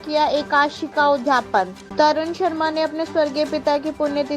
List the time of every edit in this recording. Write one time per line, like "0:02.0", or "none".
0:01.8